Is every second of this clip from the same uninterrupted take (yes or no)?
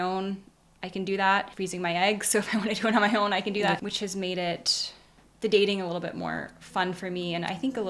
no